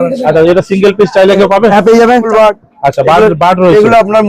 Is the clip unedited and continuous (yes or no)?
no